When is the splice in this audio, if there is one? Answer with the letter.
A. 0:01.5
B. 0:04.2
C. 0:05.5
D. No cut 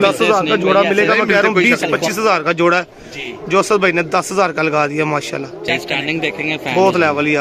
D